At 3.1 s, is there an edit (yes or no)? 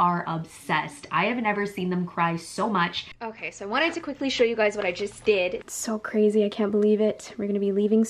yes